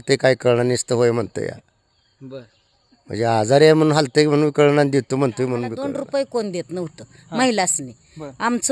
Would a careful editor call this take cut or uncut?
cut